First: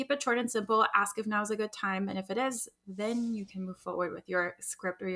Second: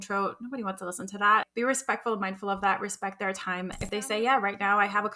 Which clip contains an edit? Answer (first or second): second